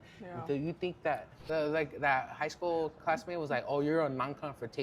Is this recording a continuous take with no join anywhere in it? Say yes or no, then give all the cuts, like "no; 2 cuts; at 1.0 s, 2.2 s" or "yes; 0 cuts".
no; 1 cut; at 1.3 s